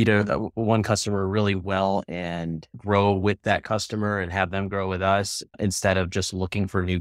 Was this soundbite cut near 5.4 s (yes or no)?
yes